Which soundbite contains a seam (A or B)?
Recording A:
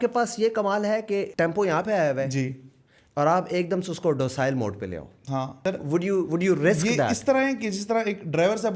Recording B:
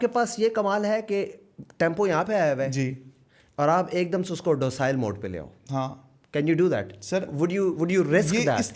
A